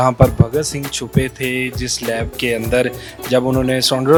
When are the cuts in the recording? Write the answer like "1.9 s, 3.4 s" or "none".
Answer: none